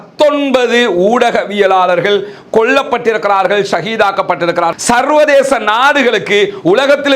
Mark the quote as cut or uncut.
cut